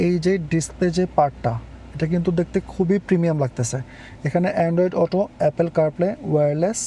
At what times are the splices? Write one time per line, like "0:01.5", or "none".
none